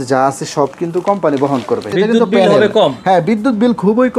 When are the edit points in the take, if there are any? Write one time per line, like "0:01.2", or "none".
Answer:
0:01.9